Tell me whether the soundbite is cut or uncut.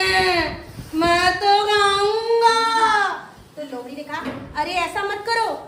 uncut